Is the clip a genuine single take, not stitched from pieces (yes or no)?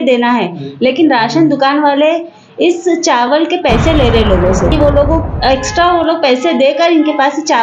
no